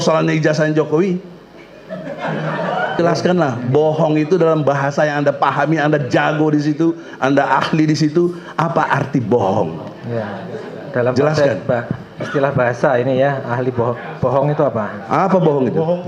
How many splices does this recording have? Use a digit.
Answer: 1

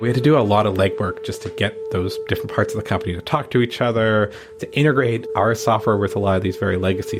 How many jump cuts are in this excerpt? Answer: 0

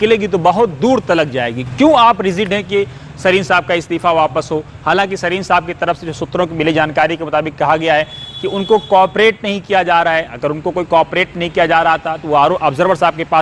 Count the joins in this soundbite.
0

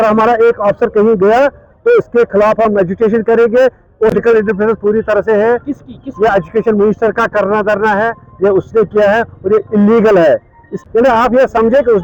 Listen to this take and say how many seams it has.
2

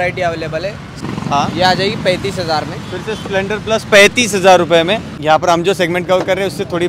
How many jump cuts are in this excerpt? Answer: 2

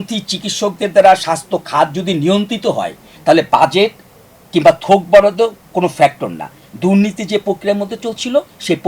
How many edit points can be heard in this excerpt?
0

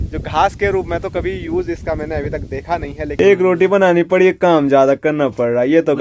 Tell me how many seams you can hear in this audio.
1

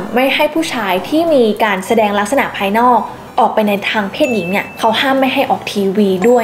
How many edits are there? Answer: 0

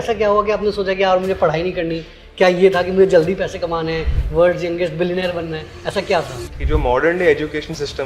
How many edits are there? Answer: 1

